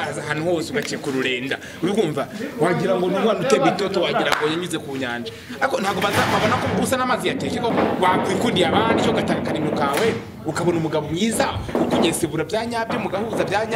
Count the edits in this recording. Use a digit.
1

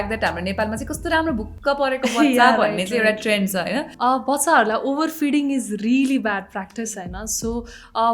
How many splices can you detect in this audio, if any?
1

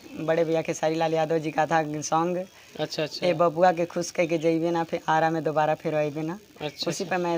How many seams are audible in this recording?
0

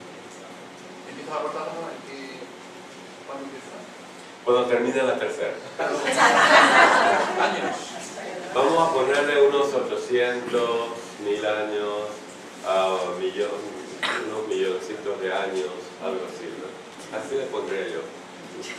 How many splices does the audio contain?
0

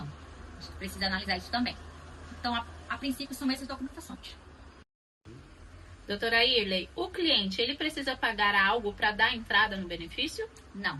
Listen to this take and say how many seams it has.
1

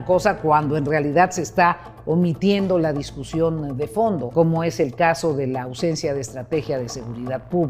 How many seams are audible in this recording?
1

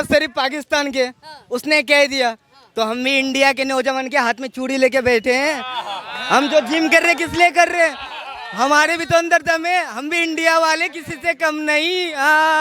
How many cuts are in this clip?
0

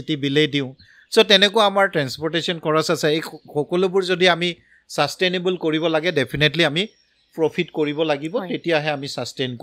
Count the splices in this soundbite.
0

